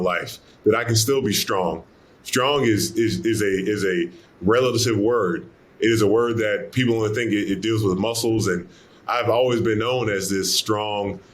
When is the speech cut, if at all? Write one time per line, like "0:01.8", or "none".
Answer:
0:08.8